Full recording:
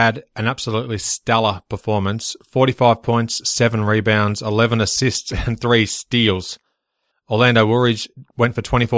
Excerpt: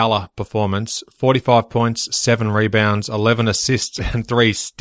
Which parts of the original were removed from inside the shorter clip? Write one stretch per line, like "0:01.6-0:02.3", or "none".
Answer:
none

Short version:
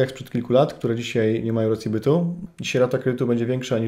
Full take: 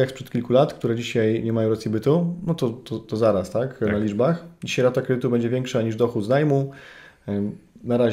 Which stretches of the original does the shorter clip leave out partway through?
0:02.4-0:04.5

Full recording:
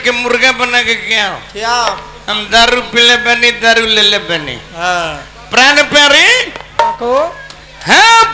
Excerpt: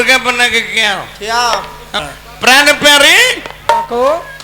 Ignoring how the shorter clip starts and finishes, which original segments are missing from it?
0:02.4-0:05.2

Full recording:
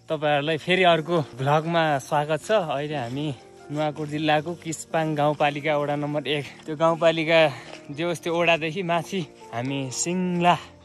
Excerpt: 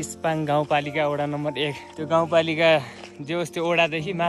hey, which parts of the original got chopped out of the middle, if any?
none

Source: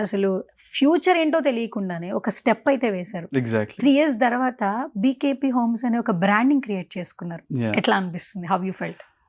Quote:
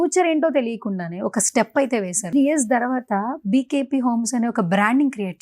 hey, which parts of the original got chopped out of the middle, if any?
0:03.1-0:03.7

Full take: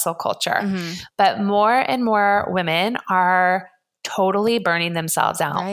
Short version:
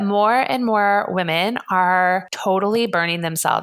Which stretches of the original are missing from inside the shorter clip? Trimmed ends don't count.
0:03.7-0:04.0

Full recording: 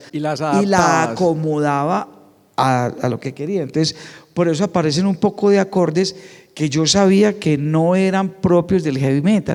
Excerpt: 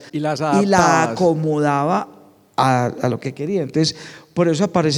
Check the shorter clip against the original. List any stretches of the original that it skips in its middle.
none

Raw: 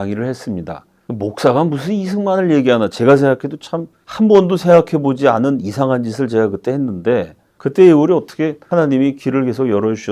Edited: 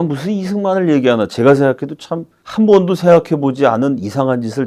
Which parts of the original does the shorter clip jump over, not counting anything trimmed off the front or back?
none

